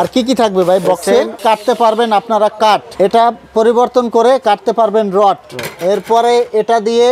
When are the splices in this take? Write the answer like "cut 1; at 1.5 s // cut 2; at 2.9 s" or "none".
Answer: cut 1; at 1.4 s